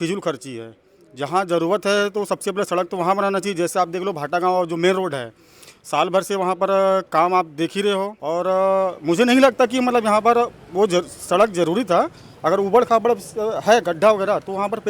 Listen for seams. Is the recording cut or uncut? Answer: cut